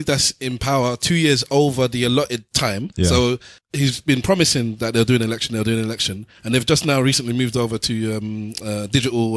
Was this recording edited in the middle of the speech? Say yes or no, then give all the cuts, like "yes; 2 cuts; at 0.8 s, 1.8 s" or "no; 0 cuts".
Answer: yes; 2 cuts; at 2.8 s, 3.6 s